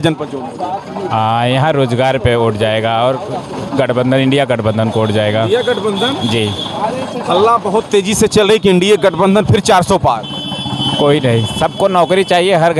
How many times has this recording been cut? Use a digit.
0